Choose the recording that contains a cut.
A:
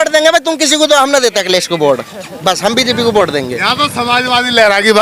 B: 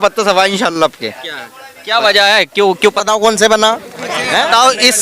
B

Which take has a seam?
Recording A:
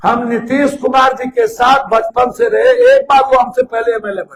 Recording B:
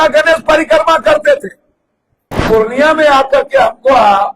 B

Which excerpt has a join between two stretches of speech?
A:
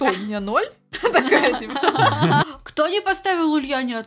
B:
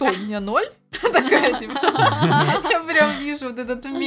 A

